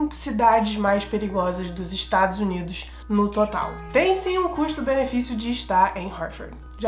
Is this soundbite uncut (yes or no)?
no